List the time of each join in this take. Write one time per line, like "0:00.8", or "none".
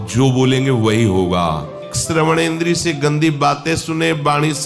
0:01.9